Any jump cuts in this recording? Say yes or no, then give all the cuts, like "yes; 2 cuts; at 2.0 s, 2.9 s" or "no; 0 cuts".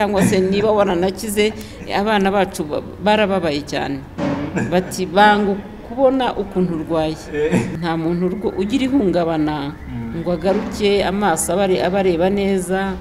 yes; 1 cut; at 7.7 s